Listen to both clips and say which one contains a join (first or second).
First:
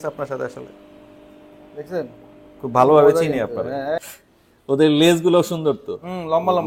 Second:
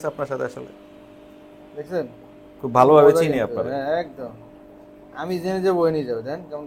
first